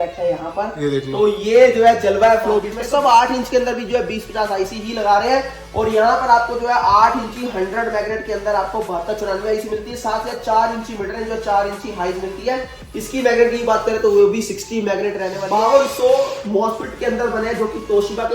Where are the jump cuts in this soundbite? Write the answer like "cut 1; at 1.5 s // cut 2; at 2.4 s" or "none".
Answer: cut 1; at 2.8 s // cut 2; at 15.3 s

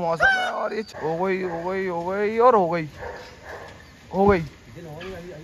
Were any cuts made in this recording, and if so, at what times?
cut 1; at 0.9 s

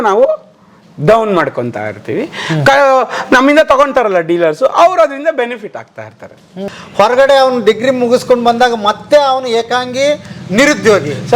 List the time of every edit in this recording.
cut 1; at 6.7 s

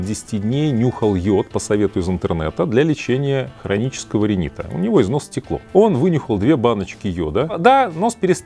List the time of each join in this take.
cut 1; at 7.5 s

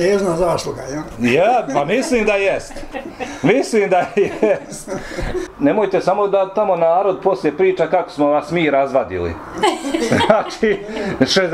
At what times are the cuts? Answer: cut 1; at 5.5 s

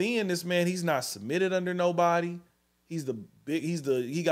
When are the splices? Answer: none

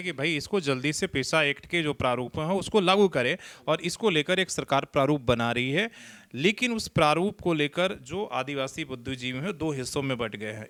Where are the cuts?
none

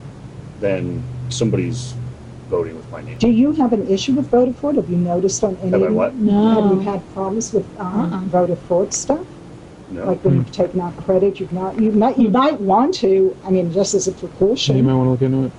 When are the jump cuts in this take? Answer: none

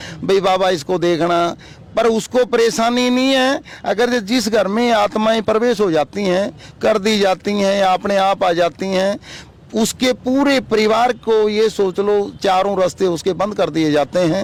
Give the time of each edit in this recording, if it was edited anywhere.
none

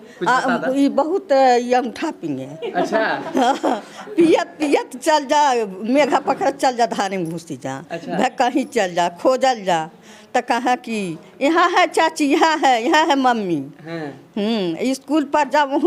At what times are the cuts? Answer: none

